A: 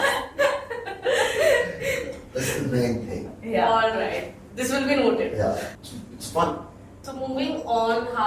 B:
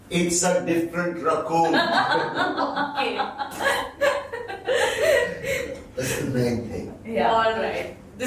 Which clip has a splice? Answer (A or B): A